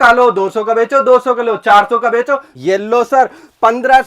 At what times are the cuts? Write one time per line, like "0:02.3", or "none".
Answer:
0:02.5